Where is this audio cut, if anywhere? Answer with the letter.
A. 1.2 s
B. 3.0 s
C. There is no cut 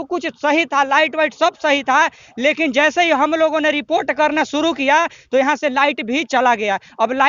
C